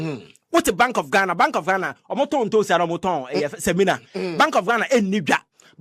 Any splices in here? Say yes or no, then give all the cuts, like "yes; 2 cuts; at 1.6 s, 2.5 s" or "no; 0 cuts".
yes; 1 cut; at 2.3 s